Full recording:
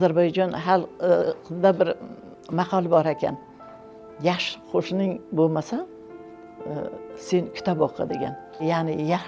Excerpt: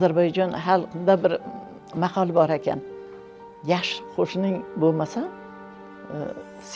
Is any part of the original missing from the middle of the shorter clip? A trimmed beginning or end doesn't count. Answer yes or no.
yes